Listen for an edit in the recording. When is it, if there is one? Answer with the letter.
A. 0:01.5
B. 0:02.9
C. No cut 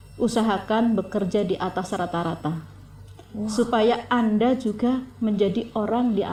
C